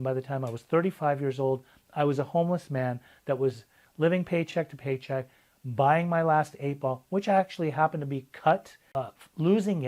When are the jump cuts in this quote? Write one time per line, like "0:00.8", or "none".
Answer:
0:08.8